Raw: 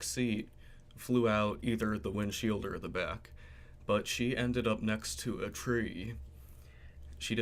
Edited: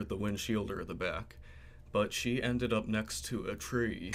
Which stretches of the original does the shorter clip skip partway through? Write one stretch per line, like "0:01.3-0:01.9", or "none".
none